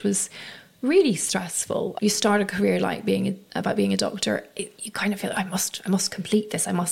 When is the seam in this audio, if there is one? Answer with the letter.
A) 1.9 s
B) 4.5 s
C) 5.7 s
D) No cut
A